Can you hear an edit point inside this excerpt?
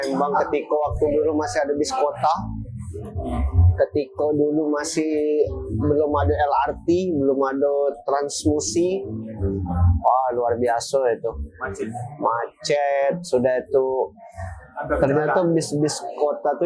no; 0 cuts

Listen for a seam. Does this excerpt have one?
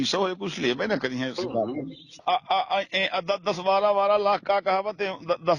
yes; 1 cut; at 2.2 s

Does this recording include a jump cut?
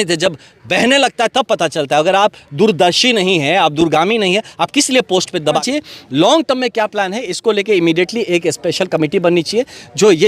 yes; 1 cut; at 5.6 s

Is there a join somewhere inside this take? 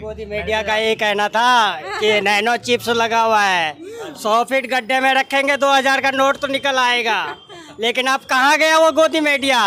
no; 0 cuts

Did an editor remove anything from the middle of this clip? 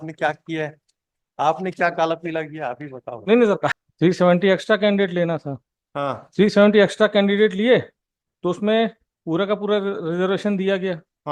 yes; 1 cut; at 3.7 s

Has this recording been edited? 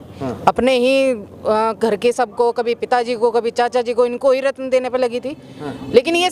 no; 0 cuts

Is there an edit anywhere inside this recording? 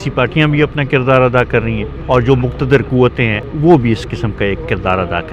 yes; 2 cuts; at 1.9 s, 3.4 s

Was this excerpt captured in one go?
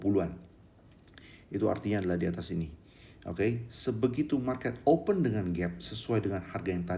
yes; 0 cuts

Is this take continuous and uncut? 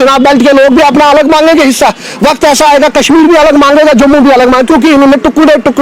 yes; 0 cuts

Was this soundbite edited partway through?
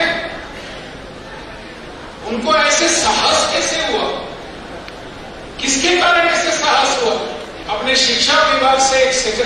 yes; 1 cut; at 7.5 s

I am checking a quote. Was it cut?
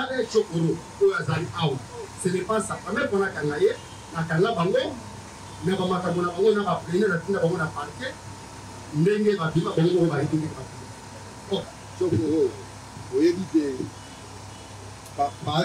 yes; 1 cut; at 11.8 s

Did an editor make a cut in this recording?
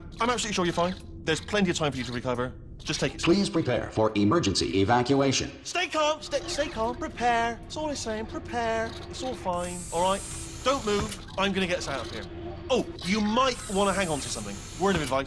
yes; 1 cut; at 11.3 s

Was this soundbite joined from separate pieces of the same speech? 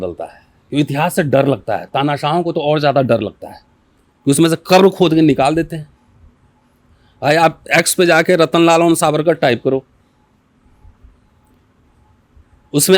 no; 0 cuts

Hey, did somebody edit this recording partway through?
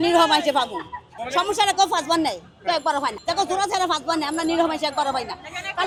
no; 0 cuts

